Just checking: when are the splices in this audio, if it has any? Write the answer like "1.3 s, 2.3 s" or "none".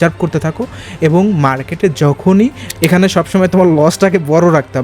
2.7 s